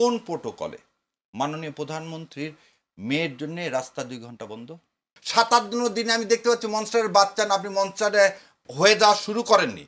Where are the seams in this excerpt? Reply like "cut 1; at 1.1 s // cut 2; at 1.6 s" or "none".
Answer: cut 1; at 5.2 s